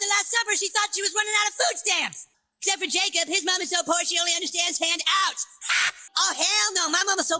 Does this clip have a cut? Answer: yes; 2 cuts; at 2.4 s, 6.0 s

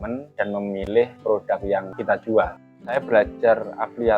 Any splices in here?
yes; 1 cut; at 2.7 s

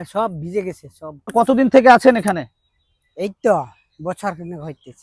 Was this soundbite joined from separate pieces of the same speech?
yes; 1 cut; at 1.3 s

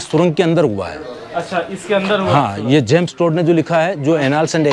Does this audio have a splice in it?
no; 0 cuts

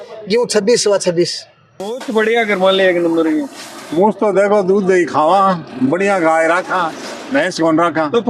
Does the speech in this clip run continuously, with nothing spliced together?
no; 1 cut; at 1.9 s

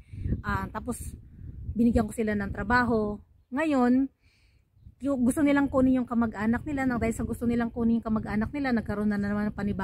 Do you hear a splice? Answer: no; 0 cuts

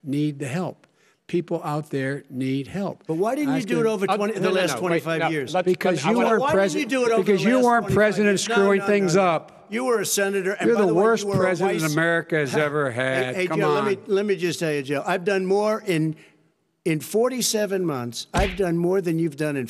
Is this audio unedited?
yes; 0 cuts

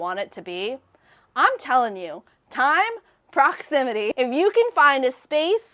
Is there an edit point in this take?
yes; 1 cut; at 4.1 s

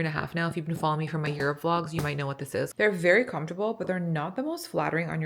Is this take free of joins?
no; 1 cut; at 2.7 s

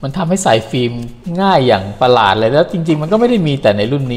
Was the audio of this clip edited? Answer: no; 0 cuts

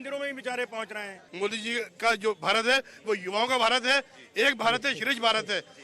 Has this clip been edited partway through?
yes; 1 cut; at 1.2 s

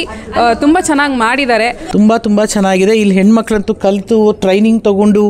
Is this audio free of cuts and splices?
no; 1 cut; at 1.8 s

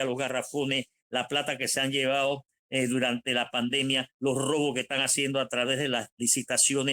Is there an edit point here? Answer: no; 0 cuts

